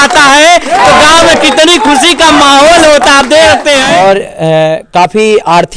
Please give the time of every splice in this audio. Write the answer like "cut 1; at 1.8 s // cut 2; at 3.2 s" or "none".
cut 1; at 3.9 s